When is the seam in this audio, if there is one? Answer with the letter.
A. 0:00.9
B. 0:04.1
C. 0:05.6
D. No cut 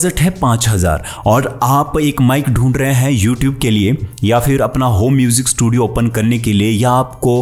D